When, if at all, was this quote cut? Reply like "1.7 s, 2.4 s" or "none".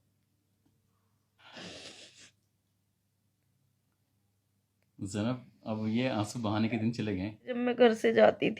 1.4 s, 7.5 s